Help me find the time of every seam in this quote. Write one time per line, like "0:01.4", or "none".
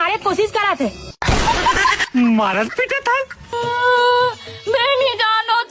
0:03.4